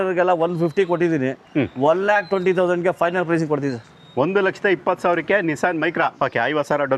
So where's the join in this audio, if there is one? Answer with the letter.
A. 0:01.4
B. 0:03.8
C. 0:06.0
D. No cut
C